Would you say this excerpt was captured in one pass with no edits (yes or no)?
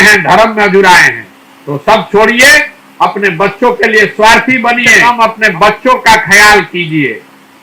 no